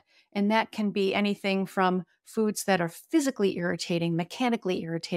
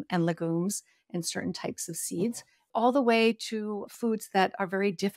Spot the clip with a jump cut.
second; 2 cuts; at 2.6 s, 3.9 s

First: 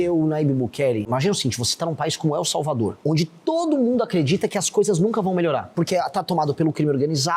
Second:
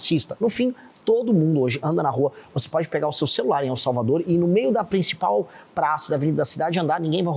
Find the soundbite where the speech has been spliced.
first; 3 cuts; at 1.1 s, 3.0 s, 5.7 s

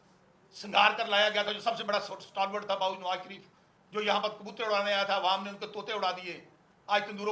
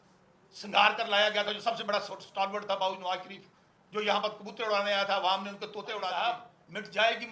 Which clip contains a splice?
second; 1 cut; at 6.1 s

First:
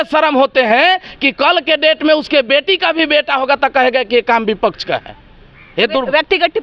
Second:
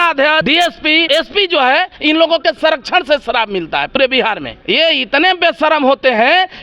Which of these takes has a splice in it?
second; 2 cuts; at 1.0 s, 4.5 s

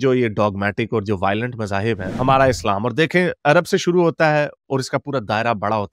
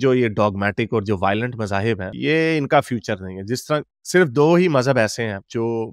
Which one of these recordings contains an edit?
first; 1 cut; at 2.2 s

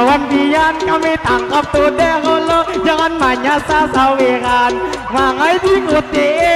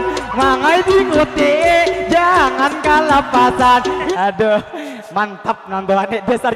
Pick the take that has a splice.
second; 1 cut; at 4.1 s

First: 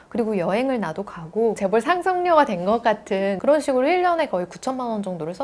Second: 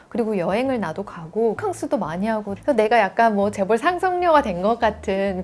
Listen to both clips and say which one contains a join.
first; 2 cuts; at 1.6 s, 3.4 s

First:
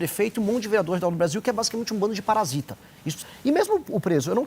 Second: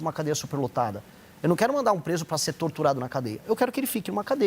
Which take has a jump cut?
first; 1 cut; at 3.2 s

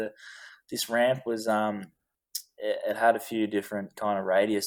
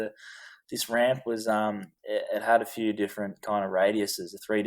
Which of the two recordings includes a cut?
second; 1 cut; at 1.9 s

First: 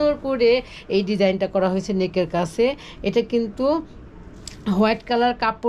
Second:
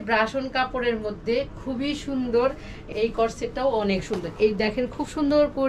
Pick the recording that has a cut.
second; 1 cut; at 2.8 s

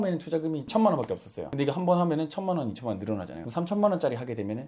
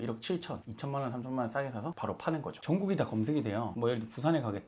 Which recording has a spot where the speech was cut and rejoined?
second; 2 cuts; at 2.5 s, 3.7 s

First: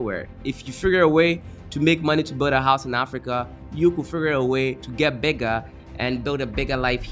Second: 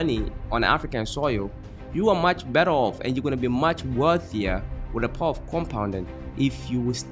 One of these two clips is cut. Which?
first; 2 cuts; at 4.9 s, 5.8 s

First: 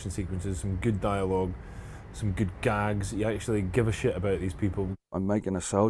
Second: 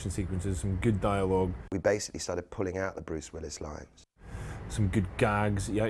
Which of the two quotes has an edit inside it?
first; 2 cuts; at 1.6 s, 5.1 s

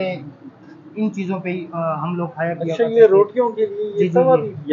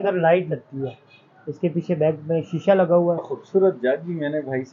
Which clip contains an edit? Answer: second; 1 cut; at 3.4 s

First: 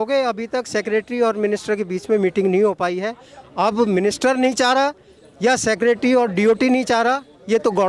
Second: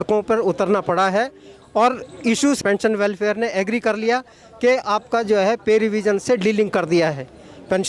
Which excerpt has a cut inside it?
second; 1 cut; at 2.6 s

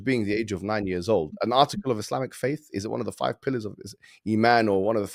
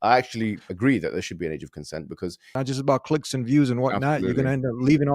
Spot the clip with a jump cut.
second; 1 cut; at 2.4 s

